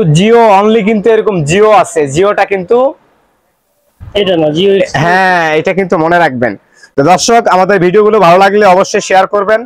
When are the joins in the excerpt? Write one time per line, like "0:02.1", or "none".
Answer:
none